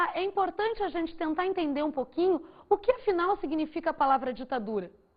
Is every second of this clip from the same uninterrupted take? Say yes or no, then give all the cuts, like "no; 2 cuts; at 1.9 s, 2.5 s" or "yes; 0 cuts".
no; 1 cut; at 3.0 s